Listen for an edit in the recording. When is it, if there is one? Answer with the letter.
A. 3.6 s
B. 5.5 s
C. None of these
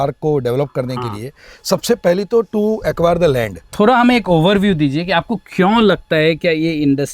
A